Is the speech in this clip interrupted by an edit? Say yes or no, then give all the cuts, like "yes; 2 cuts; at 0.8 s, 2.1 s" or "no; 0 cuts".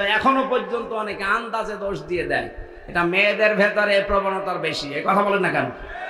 no; 0 cuts